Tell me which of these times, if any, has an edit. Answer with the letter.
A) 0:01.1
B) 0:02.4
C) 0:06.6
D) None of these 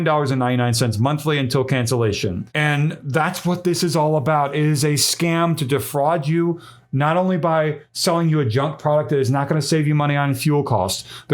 B